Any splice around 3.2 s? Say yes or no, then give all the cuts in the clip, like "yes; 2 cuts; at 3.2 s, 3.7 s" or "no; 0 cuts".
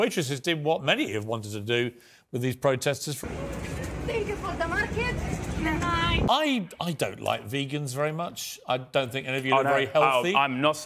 yes; 2 cuts; at 3.2 s, 6.3 s